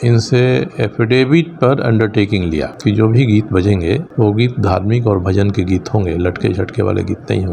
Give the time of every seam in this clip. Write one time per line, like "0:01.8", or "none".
0:02.7
0:04.1